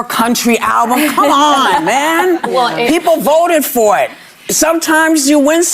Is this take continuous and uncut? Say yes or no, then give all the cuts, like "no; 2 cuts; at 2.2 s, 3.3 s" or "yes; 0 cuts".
no; 1 cut; at 1.4 s